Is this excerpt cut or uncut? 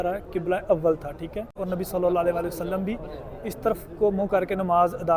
cut